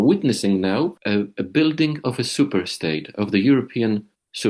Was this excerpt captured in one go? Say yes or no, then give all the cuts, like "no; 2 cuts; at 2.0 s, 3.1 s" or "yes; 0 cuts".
no; 1 cut; at 1.0 s